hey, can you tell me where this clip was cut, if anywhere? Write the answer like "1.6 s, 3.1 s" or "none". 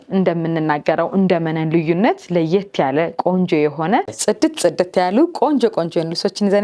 4.1 s